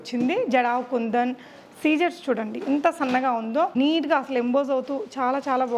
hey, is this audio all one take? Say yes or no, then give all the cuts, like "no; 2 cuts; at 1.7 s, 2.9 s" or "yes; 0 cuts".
yes; 0 cuts